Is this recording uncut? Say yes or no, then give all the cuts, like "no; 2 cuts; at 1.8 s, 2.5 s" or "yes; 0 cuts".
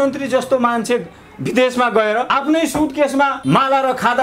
no; 2 cuts; at 2.3 s, 3.4 s